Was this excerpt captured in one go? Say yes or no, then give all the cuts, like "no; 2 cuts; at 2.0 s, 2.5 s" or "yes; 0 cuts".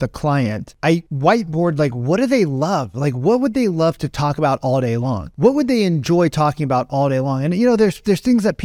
yes; 0 cuts